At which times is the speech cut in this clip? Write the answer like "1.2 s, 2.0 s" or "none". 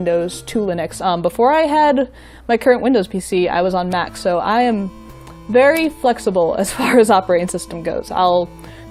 4.6 s